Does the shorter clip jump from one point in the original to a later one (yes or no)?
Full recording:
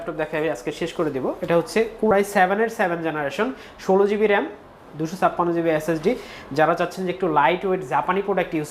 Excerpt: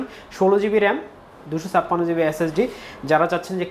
no